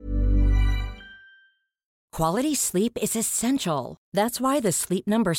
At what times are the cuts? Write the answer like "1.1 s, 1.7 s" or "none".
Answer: 2.0 s